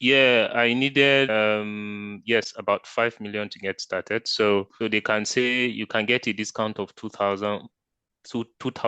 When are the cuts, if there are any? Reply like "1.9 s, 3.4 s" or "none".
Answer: 1.3 s, 4.7 s